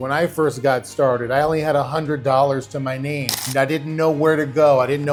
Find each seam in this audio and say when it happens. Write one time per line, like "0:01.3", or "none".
none